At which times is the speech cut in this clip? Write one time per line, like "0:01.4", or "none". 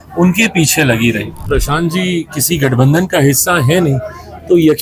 0:01.4